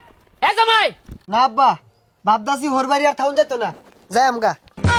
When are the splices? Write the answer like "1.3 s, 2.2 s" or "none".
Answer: none